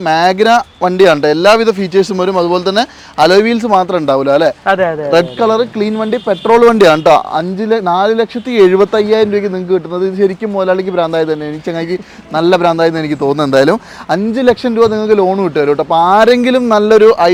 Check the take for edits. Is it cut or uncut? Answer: uncut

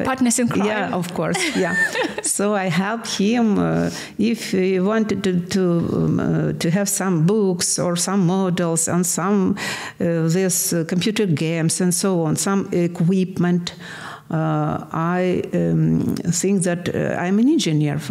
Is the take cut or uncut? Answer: uncut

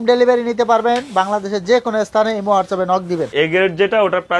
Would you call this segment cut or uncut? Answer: cut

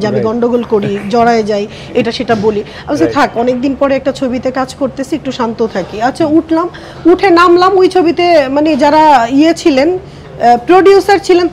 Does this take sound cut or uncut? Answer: uncut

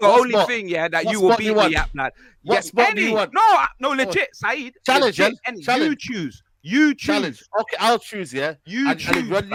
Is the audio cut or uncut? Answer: uncut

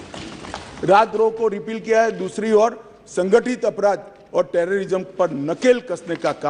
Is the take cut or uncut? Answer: uncut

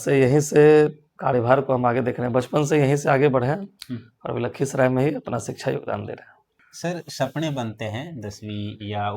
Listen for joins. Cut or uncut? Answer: cut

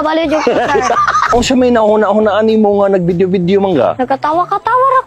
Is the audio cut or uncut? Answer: cut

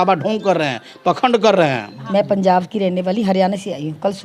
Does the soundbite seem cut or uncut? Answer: cut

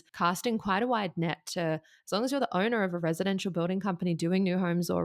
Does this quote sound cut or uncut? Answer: uncut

